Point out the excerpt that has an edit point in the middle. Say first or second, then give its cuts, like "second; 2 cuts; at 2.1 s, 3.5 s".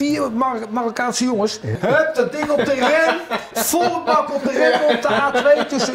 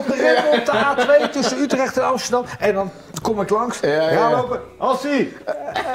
first; 1 cut; at 1.8 s